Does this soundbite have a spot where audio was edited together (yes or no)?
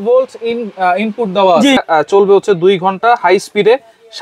yes